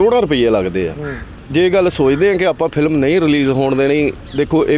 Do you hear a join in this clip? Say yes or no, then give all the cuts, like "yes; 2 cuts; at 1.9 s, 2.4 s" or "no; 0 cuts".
yes; 1 cut; at 1.3 s